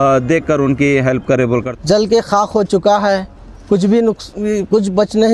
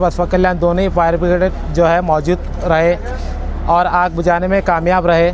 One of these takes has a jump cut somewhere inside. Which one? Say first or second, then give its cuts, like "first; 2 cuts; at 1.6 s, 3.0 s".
first; 1 cut; at 1.7 s